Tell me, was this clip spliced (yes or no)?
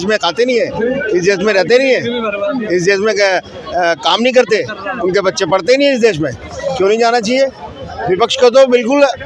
no